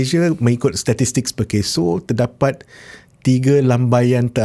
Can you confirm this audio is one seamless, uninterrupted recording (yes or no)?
yes